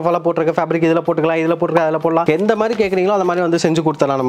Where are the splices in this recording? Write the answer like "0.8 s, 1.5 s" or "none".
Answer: none